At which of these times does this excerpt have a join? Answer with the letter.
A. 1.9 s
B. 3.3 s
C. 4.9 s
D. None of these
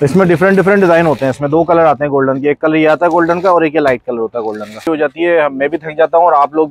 C